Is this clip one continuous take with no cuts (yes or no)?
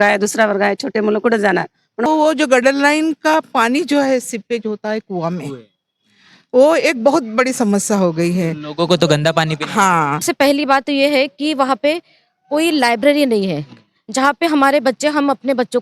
no